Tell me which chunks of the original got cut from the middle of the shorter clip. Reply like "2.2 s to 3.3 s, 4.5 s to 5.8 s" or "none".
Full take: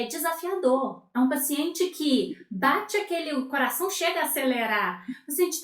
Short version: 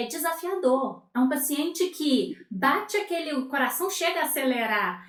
none